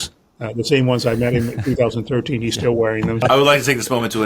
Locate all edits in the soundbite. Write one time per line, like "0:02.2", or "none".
0:03.2